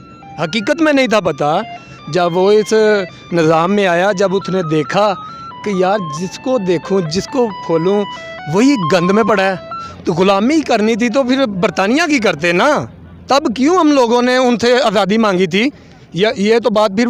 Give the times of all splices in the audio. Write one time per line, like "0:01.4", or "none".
0:09.9